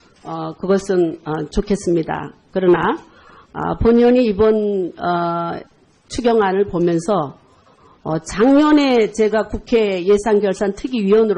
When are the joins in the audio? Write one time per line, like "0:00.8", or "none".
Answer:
none